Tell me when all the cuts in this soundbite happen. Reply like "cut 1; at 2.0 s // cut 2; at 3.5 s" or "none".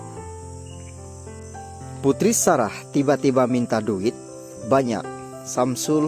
cut 1; at 1.1 s